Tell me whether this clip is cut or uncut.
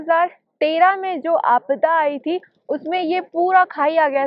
uncut